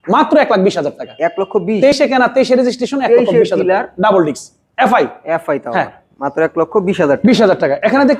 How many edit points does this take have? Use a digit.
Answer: 0